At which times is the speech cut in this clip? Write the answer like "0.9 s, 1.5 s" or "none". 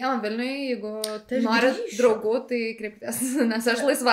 none